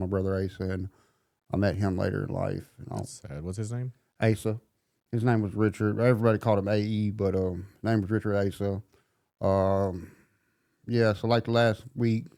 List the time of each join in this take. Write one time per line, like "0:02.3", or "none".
none